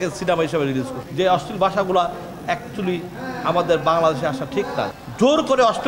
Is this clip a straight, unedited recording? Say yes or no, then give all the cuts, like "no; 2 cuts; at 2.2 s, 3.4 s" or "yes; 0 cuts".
no; 2 cuts; at 1.0 s, 4.9 s